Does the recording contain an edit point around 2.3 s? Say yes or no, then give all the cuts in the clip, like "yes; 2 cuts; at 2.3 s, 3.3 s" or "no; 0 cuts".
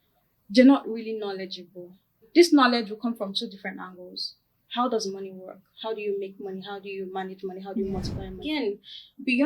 yes; 2 cuts; at 2.3 s, 8.4 s